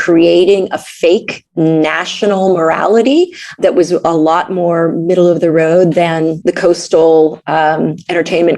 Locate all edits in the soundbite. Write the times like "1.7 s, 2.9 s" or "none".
1.4 s, 3.6 s, 6.4 s